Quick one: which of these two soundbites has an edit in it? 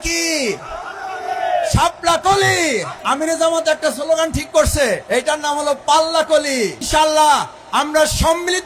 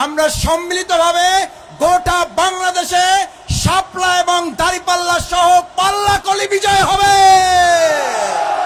first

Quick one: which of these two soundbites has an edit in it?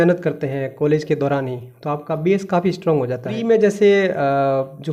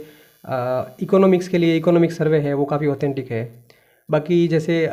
first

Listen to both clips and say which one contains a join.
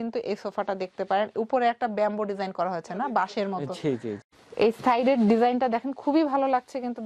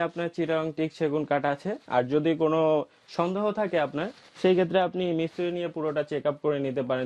first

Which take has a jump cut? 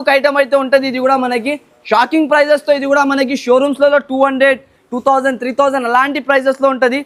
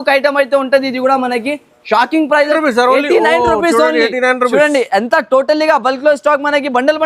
second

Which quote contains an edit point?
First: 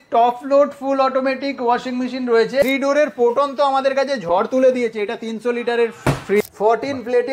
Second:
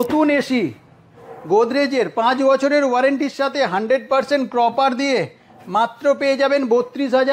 first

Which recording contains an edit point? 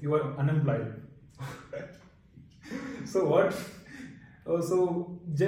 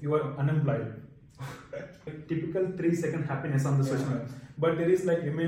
second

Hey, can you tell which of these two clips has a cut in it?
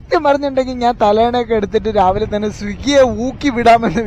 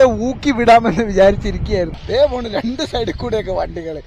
second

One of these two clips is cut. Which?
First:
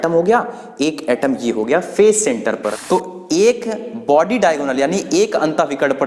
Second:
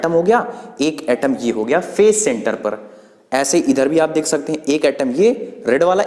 first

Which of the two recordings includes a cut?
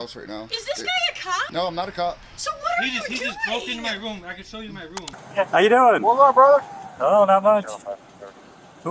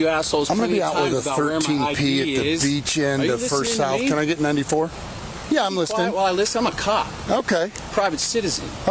first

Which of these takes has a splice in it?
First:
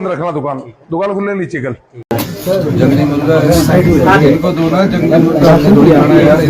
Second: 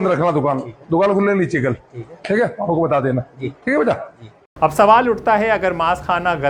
first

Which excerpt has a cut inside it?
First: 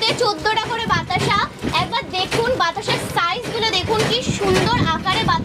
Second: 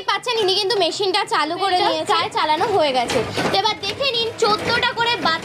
second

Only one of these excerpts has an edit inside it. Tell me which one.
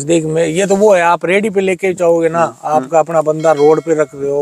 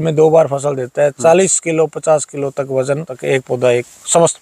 second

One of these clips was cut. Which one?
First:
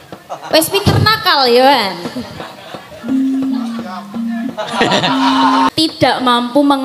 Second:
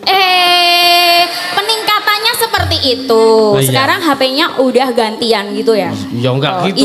first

